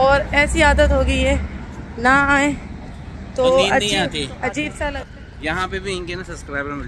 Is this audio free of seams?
no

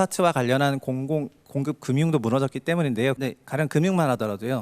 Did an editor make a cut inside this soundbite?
yes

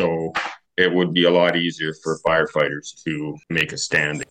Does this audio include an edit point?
yes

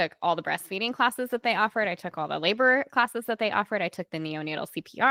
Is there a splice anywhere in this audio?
no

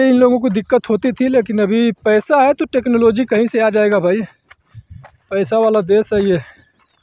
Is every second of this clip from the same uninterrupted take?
yes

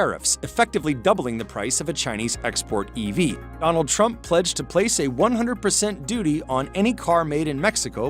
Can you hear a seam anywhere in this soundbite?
yes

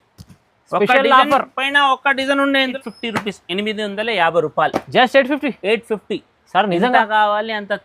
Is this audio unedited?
no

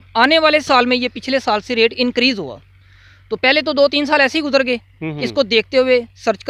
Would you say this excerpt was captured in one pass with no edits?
yes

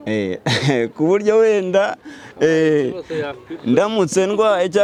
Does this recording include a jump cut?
no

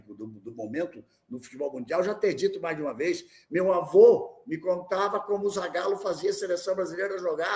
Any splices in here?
no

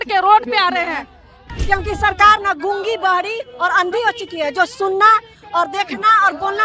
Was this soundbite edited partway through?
yes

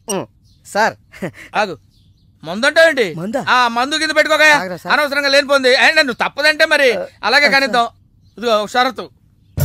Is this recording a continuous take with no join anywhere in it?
yes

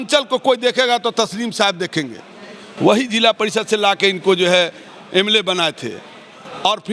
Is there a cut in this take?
no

